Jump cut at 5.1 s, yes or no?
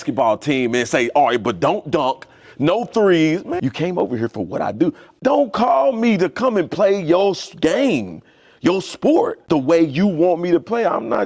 yes